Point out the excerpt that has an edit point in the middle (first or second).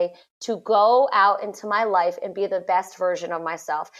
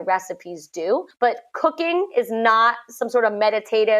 second